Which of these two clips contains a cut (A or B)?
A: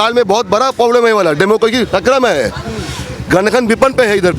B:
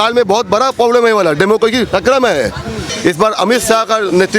B